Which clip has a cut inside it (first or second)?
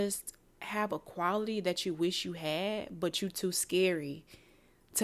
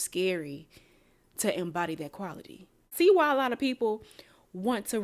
second